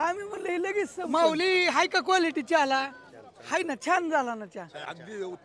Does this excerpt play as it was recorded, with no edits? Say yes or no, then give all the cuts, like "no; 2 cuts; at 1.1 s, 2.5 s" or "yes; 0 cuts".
no; 1 cut; at 1.1 s